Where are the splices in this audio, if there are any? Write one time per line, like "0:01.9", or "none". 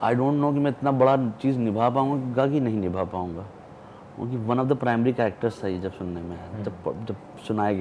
none